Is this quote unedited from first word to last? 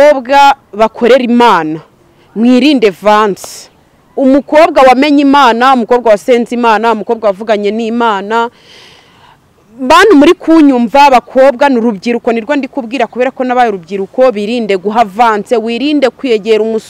yes; 0 cuts

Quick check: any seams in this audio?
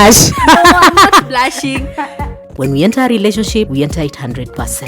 yes; 1 cut; at 2.5 s

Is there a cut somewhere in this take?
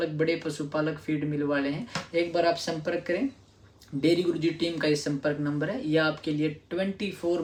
no; 0 cuts

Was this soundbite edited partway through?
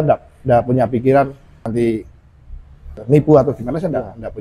yes; 2 cuts; at 1.6 s, 3.0 s

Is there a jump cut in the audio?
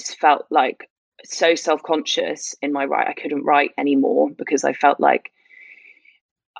no; 0 cuts

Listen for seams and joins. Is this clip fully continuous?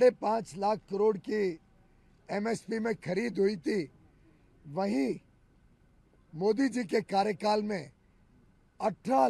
yes; 0 cuts

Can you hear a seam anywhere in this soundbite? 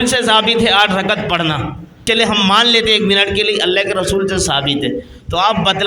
yes; 1 cut; at 2.0 s

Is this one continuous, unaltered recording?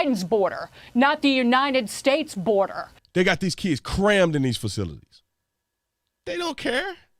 no; 1 cut; at 2.9 s

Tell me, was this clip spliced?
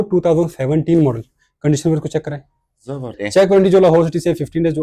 yes; 1 cut; at 3.2 s

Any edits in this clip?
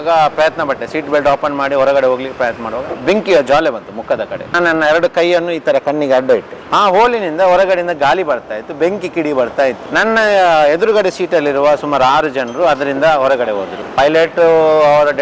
yes; 3 cuts; at 2.9 s, 6.6 s, 13.8 s

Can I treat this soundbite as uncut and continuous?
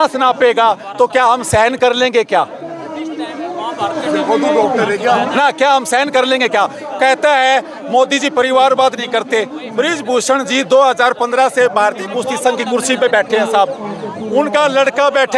yes; 0 cuts

